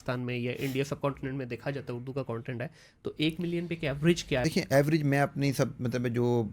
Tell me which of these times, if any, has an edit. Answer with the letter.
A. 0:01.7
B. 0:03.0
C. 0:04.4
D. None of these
C